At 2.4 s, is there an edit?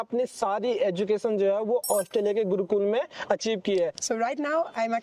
no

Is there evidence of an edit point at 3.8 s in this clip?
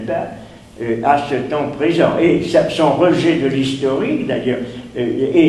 no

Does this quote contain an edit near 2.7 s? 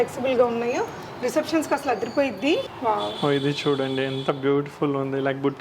yes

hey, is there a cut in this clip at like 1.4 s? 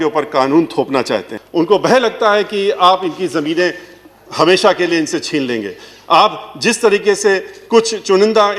yes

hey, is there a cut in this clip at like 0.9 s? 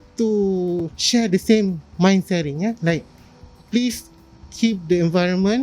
yes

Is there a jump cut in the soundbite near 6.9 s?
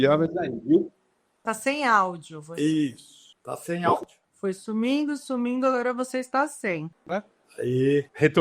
yes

